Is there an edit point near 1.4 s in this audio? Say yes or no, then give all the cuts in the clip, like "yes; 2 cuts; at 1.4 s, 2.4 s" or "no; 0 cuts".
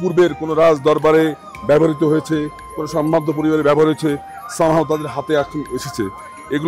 no; 0 cuts